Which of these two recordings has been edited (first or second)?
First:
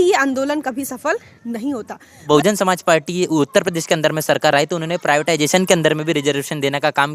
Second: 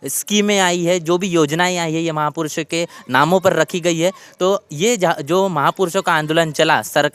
first